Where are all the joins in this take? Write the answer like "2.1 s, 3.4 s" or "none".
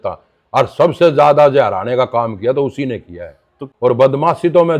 3.6 s